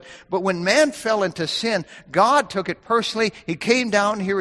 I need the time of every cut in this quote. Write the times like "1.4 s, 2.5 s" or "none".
none